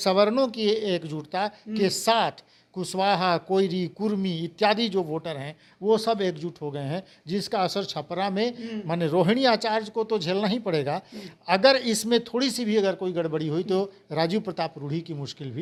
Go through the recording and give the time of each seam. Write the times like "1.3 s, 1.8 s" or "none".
none